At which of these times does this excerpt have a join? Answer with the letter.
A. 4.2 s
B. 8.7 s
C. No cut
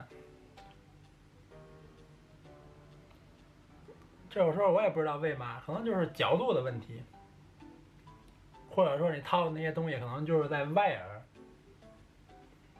C